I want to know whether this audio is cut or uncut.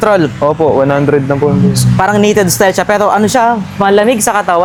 uncut